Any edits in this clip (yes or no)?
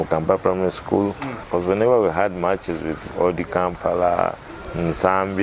yes